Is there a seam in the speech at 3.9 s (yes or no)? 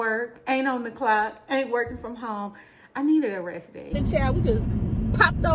yes